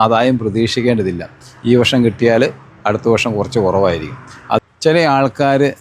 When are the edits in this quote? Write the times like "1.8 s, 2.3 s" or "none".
4.6 s